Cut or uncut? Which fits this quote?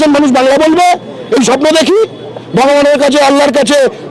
uncut